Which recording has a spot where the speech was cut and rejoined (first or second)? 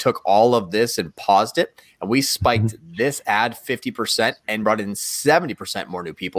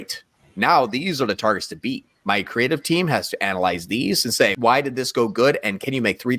second